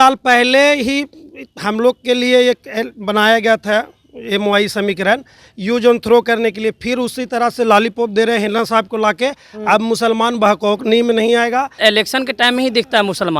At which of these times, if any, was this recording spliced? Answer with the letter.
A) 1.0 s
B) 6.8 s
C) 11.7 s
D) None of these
C